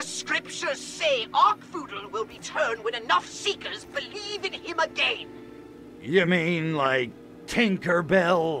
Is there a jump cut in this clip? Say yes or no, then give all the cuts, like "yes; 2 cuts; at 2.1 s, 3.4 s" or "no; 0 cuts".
no; 0 cuts